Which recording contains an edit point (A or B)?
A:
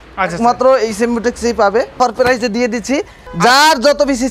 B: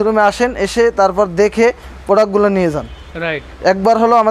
A